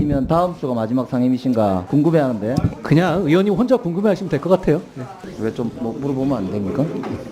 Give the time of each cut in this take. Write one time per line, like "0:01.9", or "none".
0:01.8
0:05.2